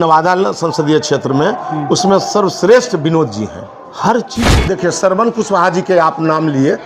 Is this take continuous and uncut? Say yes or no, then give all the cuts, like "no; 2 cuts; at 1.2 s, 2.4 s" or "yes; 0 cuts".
no; 1 cut; at 4.6 s